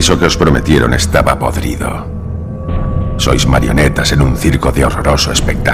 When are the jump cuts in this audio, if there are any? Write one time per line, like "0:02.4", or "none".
none

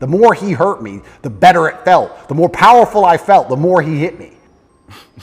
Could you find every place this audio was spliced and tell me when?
0:04.3

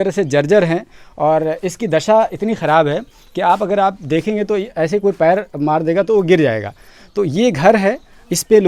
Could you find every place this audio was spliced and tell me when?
none

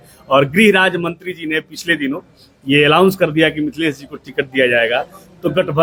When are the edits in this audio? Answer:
none

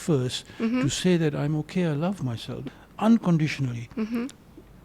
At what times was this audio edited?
0:02.6

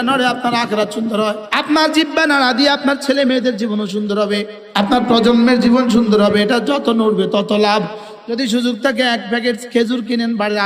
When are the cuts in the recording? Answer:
0:01.4
0:04.6
0:08.0

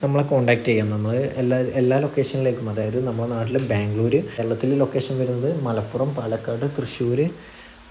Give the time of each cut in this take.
0:04.4

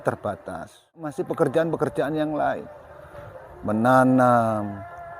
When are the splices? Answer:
0:01.2

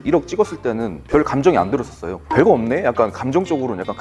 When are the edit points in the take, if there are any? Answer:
0:00.9
0:02.2

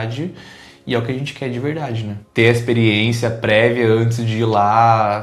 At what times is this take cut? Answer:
0:02.2

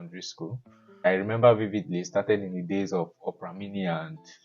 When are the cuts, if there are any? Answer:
0:01.1

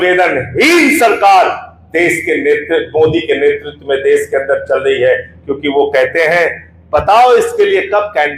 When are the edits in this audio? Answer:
none

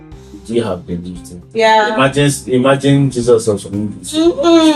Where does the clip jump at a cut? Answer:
0:01.4

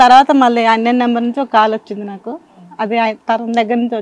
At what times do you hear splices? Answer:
none

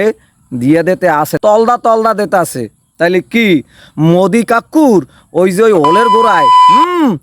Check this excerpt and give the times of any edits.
0:01.3

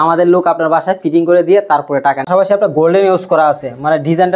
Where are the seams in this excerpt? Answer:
0:02.3

